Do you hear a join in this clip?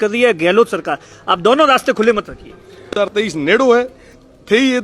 yes; 1 cut; at 3.1 s

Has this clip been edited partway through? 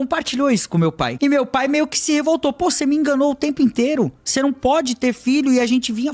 yes; 2 cuts; at 1.1 s, 4.2 s

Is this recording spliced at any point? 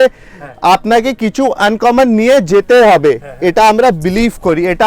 no; 0 cuts

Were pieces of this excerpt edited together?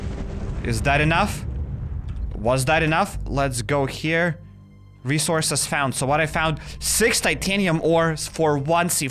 no; 0 cuts

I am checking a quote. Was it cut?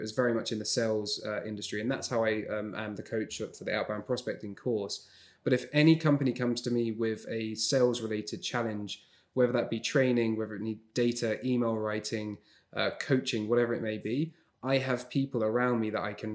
no; 0 cuts

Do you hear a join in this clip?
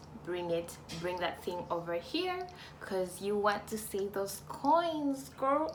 no; 0 cuts

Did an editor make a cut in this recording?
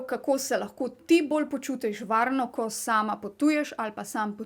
no; 0 cuts

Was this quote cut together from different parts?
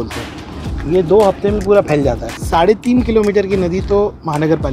yes; 1 cut; at 2.3 s

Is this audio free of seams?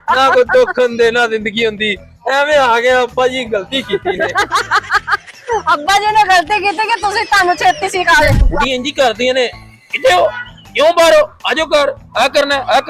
no; 1 cut; at 8.4 s

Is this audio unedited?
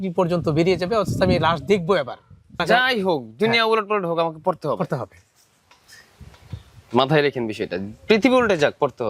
no; 1 cut; at 2.6 s

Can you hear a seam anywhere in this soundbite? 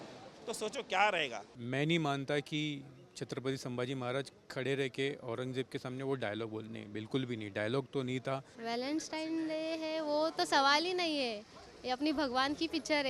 yes; 2 cuts; at 1.5 s, 8.5 s

